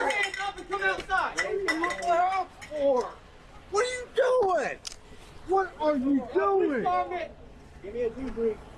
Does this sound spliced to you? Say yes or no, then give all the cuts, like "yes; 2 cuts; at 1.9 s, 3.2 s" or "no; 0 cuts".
no; 0 cuts